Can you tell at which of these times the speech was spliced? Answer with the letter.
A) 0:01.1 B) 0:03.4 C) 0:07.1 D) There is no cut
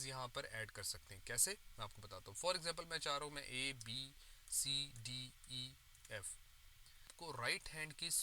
C